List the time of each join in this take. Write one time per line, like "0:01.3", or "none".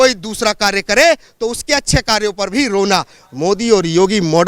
0:03.2